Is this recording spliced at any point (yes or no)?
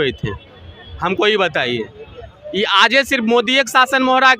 no